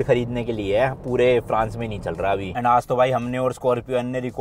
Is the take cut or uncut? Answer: cut